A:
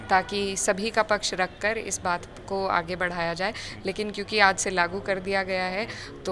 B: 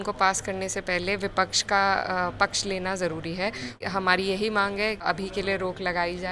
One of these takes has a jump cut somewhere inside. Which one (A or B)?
B